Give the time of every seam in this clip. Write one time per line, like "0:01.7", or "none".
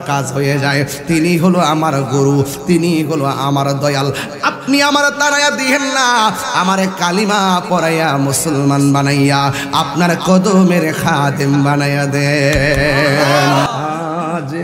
0:13.7